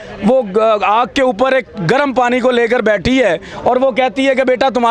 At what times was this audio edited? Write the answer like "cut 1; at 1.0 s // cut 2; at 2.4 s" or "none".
none